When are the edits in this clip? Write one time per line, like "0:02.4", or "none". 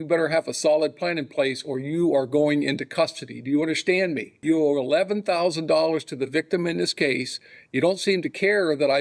0:04.3